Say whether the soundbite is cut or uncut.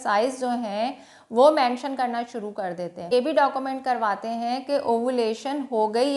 cut